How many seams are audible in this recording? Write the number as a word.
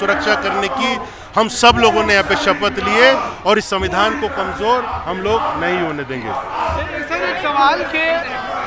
zero